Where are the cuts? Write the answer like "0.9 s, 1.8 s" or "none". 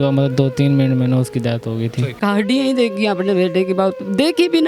2.2 s